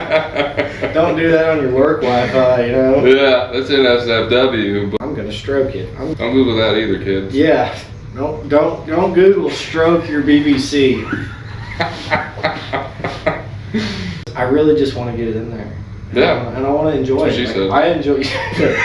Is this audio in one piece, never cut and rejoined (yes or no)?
no